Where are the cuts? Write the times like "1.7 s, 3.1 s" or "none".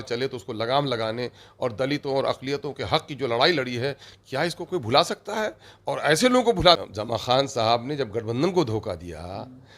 6.8 s